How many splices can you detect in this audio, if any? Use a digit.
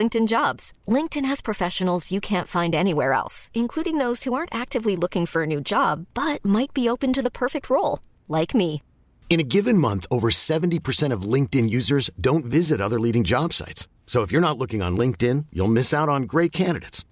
0